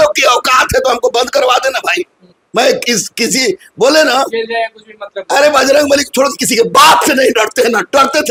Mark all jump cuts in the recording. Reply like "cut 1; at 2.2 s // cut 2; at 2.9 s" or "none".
none